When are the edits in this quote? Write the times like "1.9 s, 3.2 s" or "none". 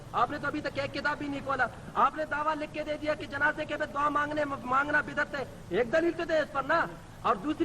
none